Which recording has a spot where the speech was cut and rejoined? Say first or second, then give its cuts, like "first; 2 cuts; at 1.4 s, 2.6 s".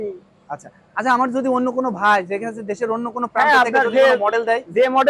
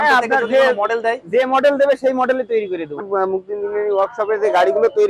second; 1 cut; at 3.0 s